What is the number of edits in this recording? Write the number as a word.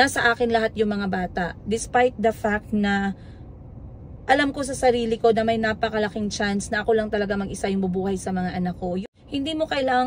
one